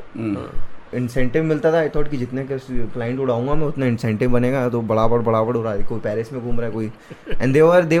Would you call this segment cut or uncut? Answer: uncut